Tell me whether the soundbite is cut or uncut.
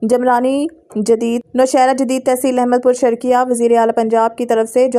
cut